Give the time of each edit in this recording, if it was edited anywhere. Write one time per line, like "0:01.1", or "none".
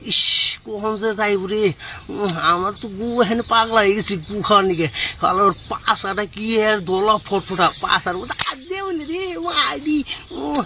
none